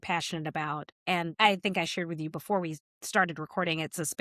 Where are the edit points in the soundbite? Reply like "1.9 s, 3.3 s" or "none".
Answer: 1.3 s